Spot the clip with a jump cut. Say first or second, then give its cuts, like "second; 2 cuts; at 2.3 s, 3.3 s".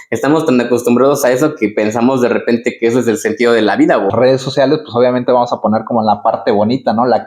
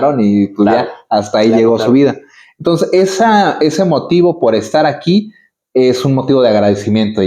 first; 1 cut; at 4.1 s